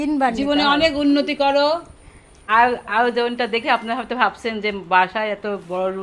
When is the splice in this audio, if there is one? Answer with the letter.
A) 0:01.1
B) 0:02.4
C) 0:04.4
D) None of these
B